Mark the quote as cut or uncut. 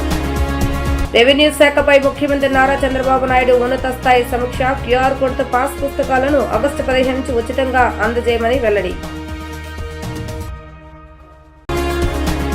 cut